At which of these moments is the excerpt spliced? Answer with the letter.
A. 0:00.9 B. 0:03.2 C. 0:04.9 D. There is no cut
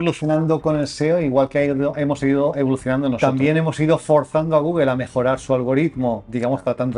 B